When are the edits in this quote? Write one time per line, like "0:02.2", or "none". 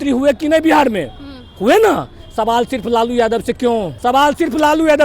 0:03.9

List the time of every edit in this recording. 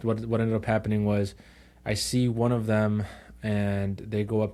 none

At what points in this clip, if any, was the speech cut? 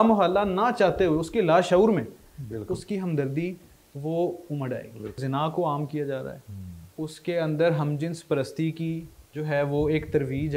0:05.2

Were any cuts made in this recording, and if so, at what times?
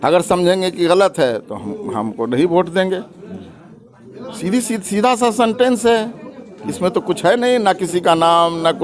none

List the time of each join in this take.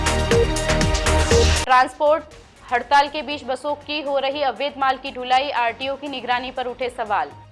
0:01.2

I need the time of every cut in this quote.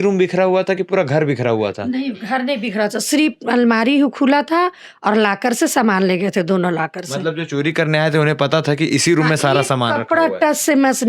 none

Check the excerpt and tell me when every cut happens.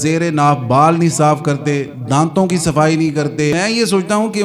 0:03.5

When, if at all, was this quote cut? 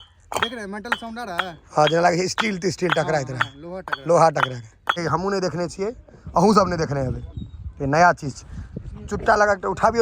0:05.0

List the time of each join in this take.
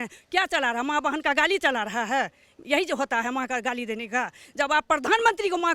none

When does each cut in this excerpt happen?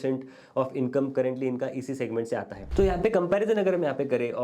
0:02.6

